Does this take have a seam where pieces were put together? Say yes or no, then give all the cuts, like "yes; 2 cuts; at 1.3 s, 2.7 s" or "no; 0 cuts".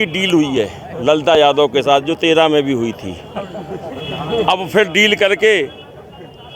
no; 0 cuts